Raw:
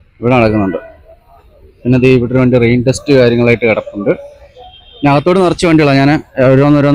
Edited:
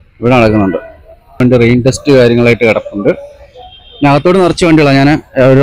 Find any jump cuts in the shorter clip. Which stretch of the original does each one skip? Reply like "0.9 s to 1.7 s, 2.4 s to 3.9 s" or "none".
1.4 s to 2.4 s

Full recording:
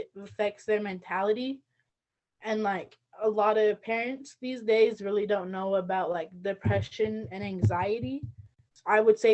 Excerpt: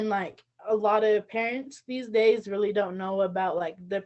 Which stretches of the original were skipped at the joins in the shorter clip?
none

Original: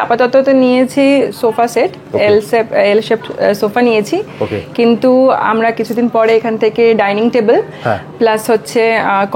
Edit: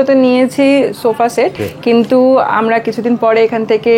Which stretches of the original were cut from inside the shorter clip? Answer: 2.0 s to 4.5 s

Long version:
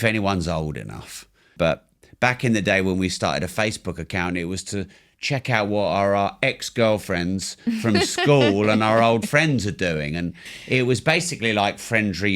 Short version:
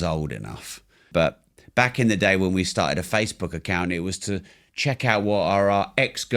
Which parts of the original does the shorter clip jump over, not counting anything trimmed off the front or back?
none

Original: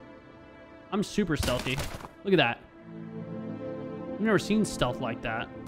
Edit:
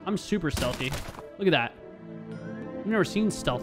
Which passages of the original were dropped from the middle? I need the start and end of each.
3.5 s to 4.0 s

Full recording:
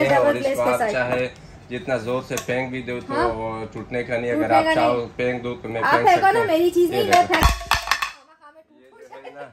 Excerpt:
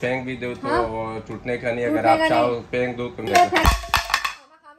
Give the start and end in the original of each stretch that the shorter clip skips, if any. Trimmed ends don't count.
5.7 s to 7.0 s

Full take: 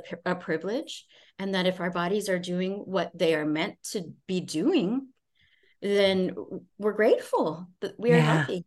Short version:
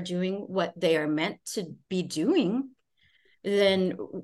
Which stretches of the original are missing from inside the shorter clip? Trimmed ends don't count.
none

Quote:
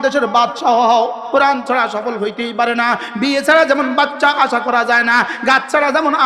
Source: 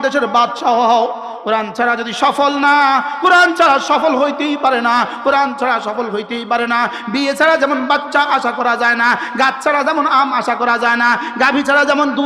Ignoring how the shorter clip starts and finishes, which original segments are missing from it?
1.2 s to 5.1 s

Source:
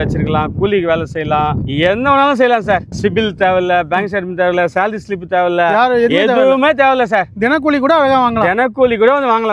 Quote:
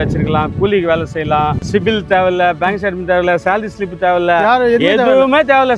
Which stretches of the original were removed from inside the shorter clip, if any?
1.6 s to 2.9 s

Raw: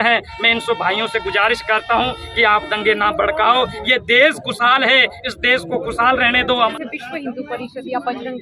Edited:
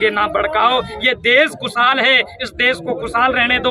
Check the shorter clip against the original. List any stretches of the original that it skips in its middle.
none

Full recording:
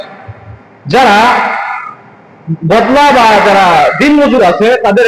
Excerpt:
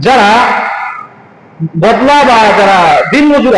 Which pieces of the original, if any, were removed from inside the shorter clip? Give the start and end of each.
none

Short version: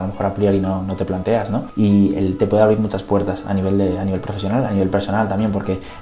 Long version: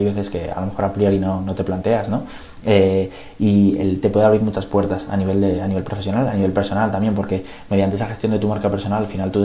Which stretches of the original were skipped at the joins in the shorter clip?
2.2 s to 3.3 s

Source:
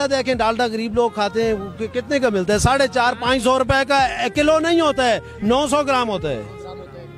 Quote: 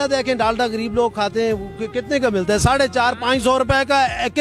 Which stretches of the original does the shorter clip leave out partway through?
none

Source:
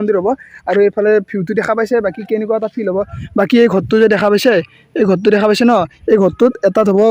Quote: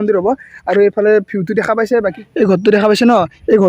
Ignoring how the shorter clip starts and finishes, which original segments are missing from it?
2.2 s to 4.8 s

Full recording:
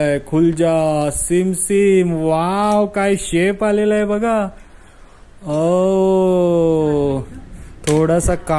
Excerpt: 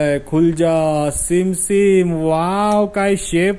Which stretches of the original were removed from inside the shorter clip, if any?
none

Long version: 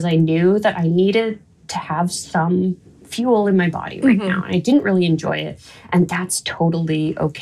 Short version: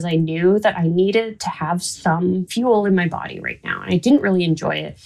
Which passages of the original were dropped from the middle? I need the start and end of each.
1.4 s to 1.7 s, 2.8 s to 3.1 s

